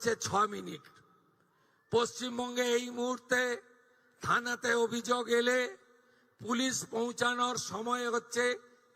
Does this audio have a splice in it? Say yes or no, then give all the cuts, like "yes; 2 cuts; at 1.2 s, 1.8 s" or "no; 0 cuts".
no; 0 cuts